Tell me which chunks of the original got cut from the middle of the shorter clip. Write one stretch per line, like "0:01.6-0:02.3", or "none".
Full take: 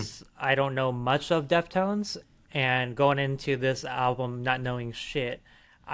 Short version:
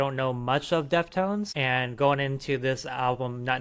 0:02.1-0:02.5